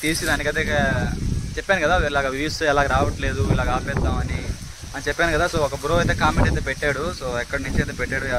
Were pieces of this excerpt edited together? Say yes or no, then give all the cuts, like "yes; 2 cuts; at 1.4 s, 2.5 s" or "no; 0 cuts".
no; 0 cuts